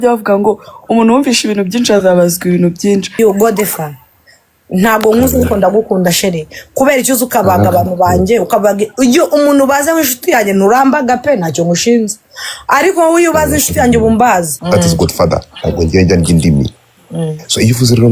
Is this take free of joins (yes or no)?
no